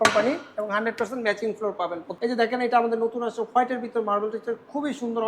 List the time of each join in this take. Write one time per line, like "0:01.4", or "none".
0:02.1